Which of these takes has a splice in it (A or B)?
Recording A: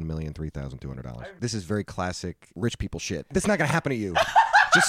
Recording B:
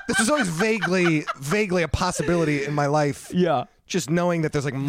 A